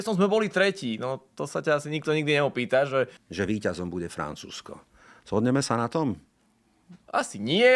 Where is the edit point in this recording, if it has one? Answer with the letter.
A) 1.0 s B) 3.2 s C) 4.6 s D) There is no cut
B